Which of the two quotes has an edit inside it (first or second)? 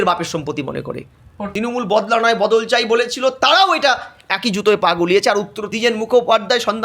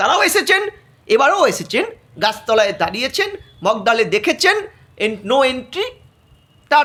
first